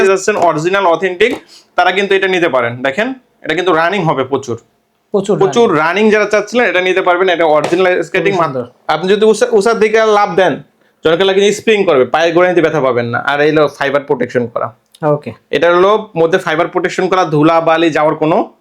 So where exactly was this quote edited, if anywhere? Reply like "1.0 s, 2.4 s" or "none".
8.5 s